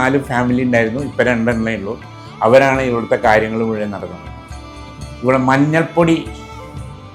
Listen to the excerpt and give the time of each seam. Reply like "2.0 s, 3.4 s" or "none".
none